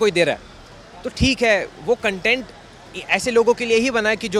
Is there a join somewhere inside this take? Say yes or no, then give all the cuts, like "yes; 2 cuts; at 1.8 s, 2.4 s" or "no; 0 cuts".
no; 0 cuts